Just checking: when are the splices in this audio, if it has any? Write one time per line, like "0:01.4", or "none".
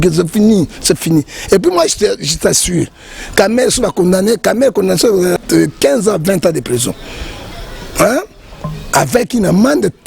0:05.4

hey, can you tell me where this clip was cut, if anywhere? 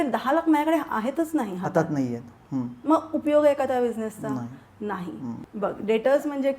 0:05.4

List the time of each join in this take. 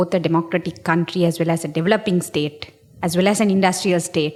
none

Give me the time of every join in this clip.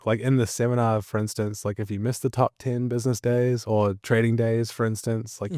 none

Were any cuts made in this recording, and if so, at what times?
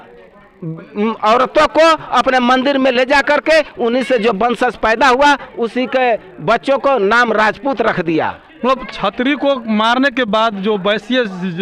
none

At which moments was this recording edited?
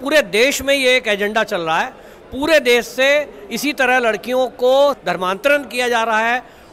none

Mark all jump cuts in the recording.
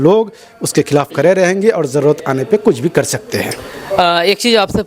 none

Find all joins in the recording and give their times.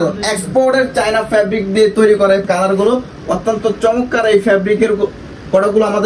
0:02.5

